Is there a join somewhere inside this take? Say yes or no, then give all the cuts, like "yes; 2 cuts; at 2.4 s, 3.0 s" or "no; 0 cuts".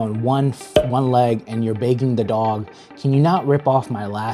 no; 0 cuts